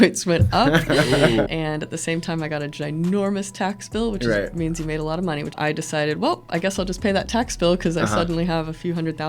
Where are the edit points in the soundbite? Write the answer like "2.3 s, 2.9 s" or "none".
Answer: 1.5 s, 5.6 s